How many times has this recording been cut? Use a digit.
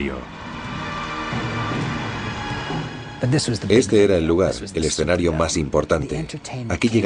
0